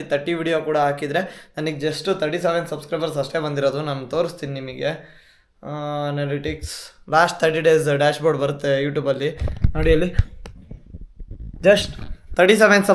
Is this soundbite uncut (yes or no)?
yes